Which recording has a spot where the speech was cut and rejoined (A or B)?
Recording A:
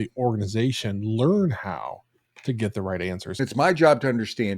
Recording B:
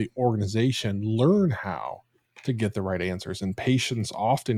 A